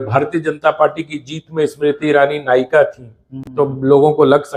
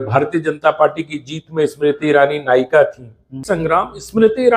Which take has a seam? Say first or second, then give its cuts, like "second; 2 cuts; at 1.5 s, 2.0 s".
second; 1 cut; at 3.4 s